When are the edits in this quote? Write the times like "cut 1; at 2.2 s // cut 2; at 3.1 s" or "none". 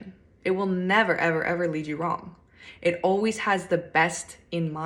none